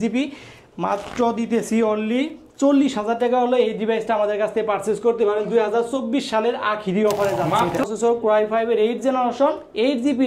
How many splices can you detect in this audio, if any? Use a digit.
1